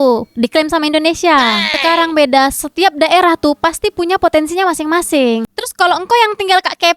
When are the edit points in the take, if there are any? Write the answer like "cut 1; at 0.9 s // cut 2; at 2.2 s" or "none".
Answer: cut 1; at 1.6 s // cut 2; at 5.5 s